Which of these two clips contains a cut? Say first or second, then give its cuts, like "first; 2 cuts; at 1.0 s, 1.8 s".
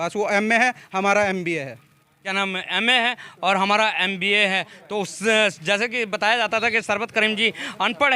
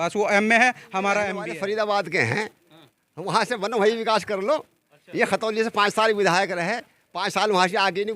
second; 1 cut; at 1.4 s